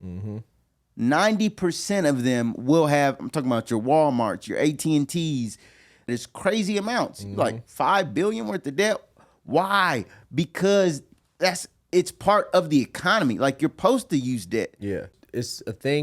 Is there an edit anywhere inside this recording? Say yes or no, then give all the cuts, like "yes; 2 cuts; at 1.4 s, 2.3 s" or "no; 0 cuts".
yes; 2 cuts; at 6.1 s, 15.1 s